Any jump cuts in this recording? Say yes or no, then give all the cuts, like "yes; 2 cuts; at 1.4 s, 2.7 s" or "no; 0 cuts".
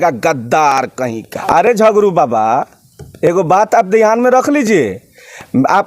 yes; 1 cut; at 1.3 s